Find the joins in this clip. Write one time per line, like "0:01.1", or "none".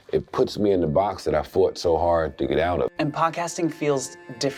0:02.9